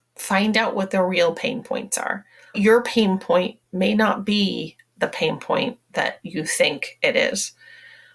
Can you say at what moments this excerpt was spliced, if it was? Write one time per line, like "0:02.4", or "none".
0:02.5